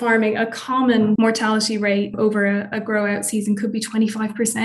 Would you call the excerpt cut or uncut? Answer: cut